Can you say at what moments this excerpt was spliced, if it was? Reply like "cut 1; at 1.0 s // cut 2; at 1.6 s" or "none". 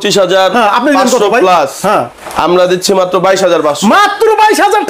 none